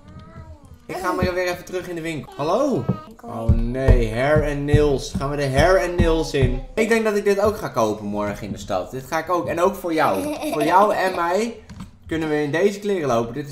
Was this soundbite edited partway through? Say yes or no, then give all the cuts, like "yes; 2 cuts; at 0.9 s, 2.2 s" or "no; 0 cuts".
yes; 3 cuts; at 2.3 s, 3.2 s, 6.6 s